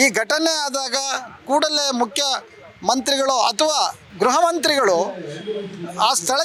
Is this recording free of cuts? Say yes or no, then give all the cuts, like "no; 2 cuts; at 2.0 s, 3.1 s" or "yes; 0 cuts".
yes; 0 cuts